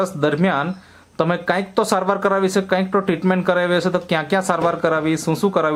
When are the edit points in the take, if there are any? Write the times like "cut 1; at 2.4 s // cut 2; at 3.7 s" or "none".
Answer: none